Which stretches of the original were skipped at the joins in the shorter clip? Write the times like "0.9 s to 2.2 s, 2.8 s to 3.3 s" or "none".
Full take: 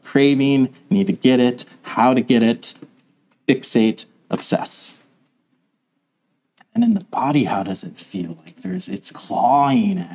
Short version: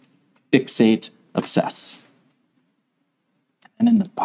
none